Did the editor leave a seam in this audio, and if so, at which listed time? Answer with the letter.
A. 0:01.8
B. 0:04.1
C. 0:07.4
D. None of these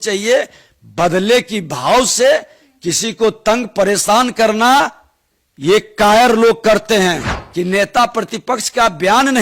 C